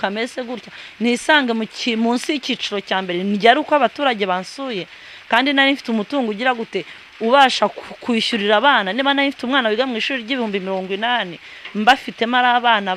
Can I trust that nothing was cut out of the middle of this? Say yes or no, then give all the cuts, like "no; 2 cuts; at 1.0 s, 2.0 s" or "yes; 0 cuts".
yes; 0 cuts